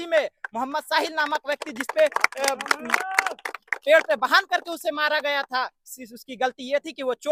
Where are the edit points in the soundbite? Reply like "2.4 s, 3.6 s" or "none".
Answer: none